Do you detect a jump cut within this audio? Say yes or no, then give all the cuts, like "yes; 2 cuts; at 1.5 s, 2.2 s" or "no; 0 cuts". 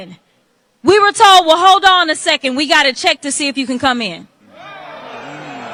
no; 0 cuts